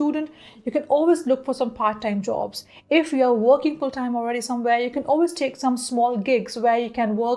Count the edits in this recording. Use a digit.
0